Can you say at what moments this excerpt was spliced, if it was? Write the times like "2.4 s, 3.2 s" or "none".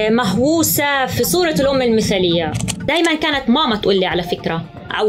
1.1 s, 2.8 s